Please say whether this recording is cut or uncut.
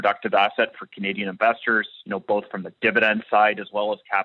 uncut